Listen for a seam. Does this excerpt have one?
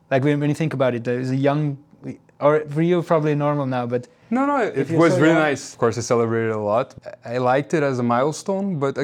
yes; 2 cuts; at 5.7 s, 6.9 s

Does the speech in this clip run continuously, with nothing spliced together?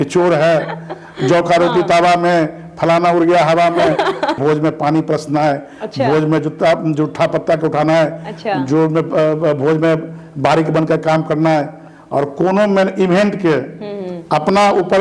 no; 1 cut; at 4.4 s

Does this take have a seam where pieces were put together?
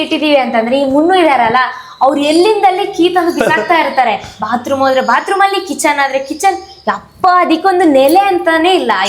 no; 0 cuts

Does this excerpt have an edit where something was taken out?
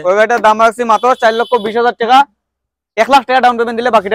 no; 0 cuts

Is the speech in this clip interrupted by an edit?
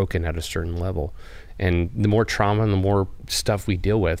yes; 1 cut; at 3.2 s

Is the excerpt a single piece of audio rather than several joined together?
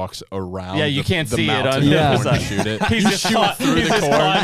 yes; 0 cuts

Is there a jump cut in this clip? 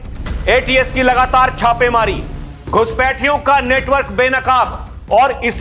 no; 0 cuts

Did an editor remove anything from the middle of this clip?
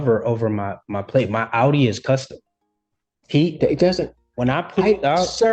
no; 0 cuts

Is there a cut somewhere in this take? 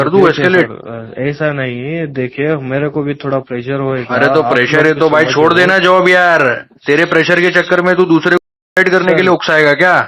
no; 0 cuts

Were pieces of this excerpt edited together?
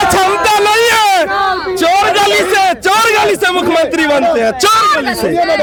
no; 0 cuts

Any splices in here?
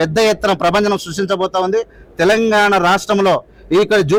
no; 0 cuts

